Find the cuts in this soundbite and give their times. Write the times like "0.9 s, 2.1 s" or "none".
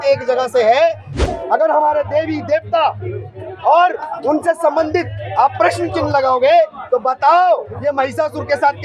1.2 s

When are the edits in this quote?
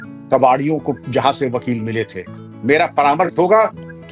2.4 s

